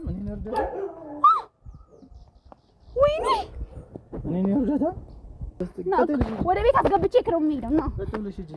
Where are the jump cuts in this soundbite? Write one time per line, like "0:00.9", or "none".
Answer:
0:05.7

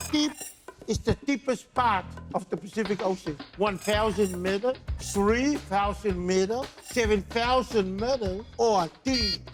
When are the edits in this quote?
none

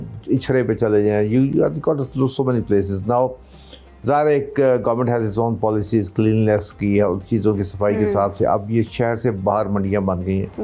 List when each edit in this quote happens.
none

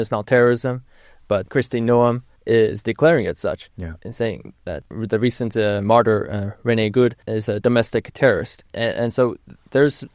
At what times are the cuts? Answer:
0:01.5
0:02.3
0:04.8
0:07.3
0:08.6

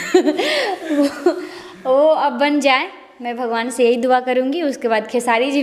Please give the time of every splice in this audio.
none

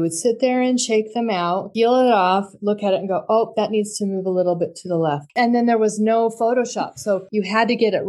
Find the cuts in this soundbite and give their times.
0:05.3
0:07.3

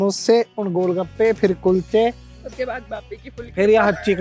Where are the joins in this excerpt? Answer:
none

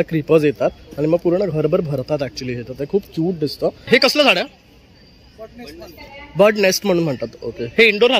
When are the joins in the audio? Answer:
0:03.9

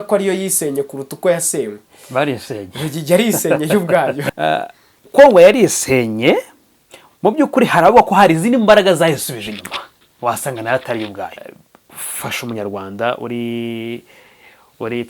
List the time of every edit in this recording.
0:04.3
0:11.4

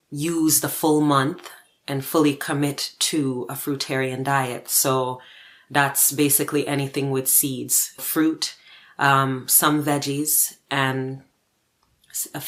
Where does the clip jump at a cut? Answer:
none

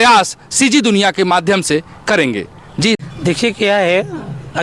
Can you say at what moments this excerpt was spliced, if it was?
0:03.0

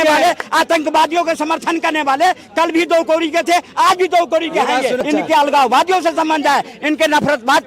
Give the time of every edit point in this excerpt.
0:05.0

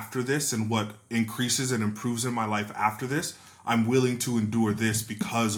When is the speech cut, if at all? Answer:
none

